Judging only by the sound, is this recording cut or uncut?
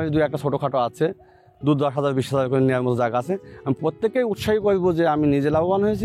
uncut